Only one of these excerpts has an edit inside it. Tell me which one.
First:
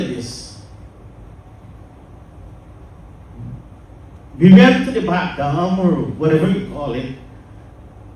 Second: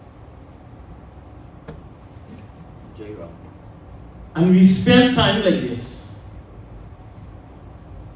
second; 1 cut; at 3.6 s

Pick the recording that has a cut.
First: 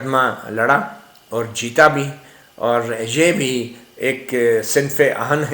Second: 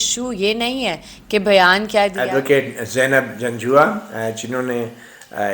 second; 1 cut; at 2.2 s

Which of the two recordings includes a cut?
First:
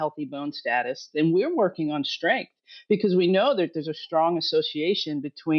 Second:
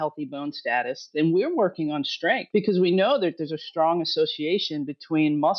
second; 1 cut; at 2.4 s

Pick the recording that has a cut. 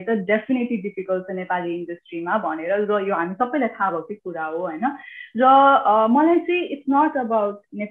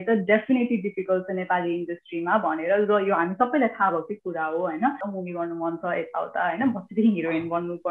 second; 1 cut; at 5.0 s

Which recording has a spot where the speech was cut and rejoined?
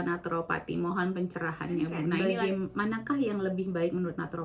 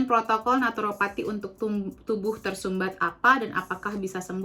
first; 1 cut; at 2.1 s

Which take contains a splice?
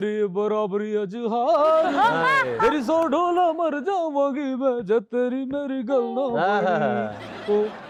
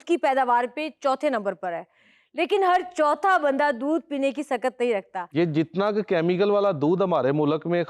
second; 1 cut; at 5.3 s

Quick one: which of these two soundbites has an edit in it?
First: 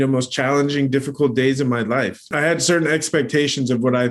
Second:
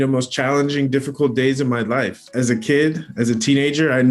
second; 1 cut; at 2.2 s

